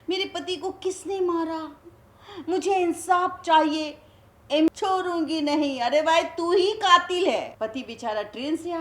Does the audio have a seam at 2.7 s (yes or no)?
no